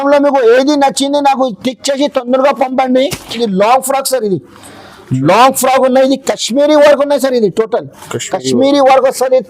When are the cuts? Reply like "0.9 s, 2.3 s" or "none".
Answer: 3.4 s